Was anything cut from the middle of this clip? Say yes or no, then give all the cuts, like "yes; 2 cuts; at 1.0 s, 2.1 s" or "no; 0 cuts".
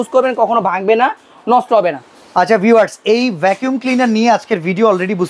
no; 0 cuts